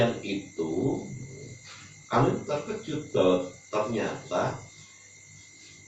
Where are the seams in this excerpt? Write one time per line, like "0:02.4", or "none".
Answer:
none